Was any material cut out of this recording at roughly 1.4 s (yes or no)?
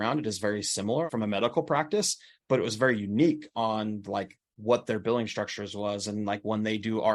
no